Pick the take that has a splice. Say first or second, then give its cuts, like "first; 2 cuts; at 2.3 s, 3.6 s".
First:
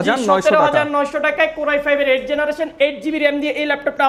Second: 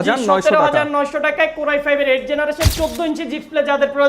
second; 1 cut; at 2.7 s